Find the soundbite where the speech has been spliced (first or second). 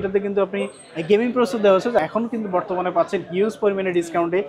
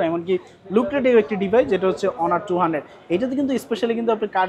first